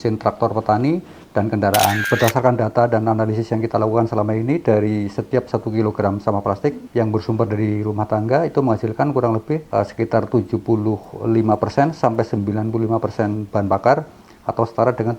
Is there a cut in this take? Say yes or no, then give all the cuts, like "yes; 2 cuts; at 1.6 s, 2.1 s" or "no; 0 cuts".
yes; 3 cuts; at 2.0 s, 6.8 s, 9.6 s